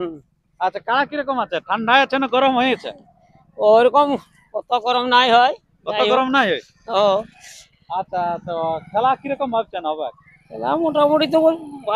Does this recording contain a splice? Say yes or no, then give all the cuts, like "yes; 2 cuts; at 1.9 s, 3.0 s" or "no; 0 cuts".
no; 0 cuts